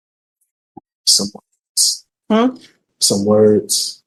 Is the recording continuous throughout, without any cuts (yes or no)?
yes